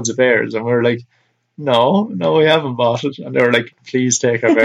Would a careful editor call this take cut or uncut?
cut